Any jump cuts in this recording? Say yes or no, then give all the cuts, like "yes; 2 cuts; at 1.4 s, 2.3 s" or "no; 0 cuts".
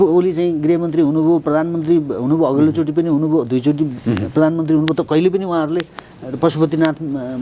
no; 0 cuts